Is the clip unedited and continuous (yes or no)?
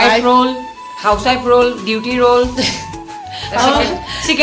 yes